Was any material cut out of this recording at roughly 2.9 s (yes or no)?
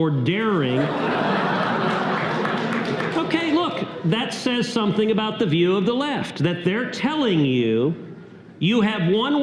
no